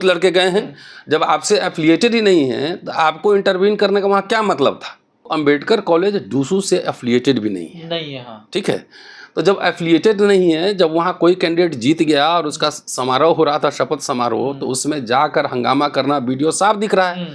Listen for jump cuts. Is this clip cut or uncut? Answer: cut